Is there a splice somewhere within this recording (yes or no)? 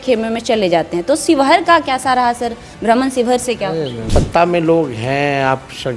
yes